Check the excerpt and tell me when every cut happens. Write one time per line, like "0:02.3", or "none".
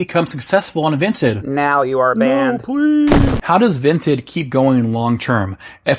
0:03.4

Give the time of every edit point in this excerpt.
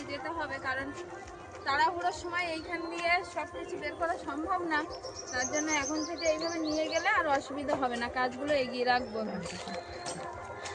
none

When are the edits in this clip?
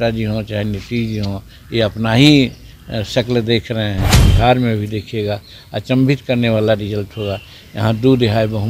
0:04.3

